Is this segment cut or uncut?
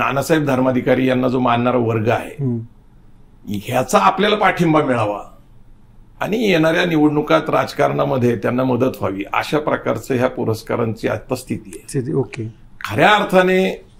uncut